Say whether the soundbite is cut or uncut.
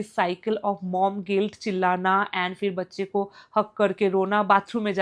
uncut